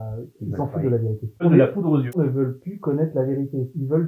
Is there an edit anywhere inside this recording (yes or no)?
yes